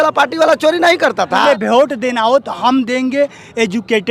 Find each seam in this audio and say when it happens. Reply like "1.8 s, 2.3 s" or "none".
1.5 s

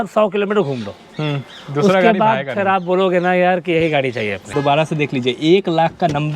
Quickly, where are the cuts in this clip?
4.4 s

